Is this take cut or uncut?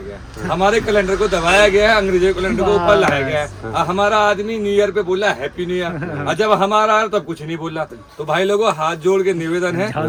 uncut